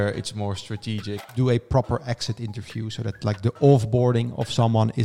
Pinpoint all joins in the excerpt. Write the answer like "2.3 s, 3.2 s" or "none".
1.2 s

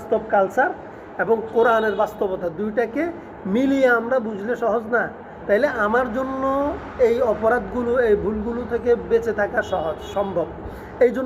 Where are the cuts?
none

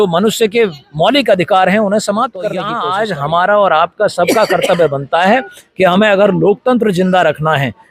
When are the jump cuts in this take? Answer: 2.8 s

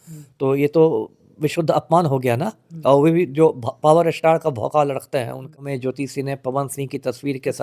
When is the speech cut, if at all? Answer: 5.5 s

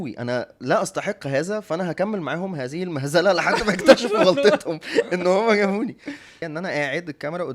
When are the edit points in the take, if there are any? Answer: 6.4 s

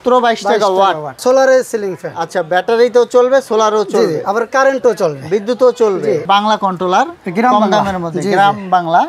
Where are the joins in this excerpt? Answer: 1.2 s, 6.3 s

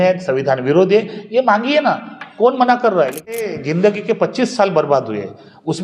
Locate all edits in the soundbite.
3.4 s

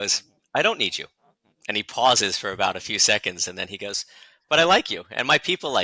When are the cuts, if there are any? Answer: none

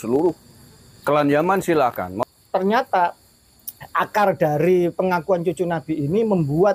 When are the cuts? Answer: 2.1 s

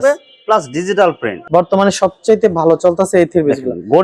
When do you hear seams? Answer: 1.4 s

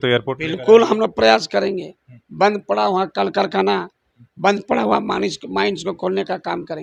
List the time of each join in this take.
none

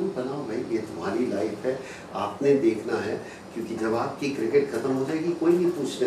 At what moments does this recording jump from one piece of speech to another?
none

